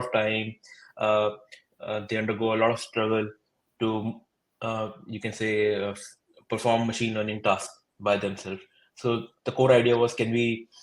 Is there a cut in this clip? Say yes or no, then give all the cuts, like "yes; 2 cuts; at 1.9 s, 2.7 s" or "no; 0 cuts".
no; 0 cuts